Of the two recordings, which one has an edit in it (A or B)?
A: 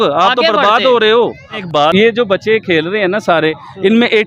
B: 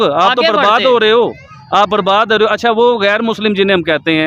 A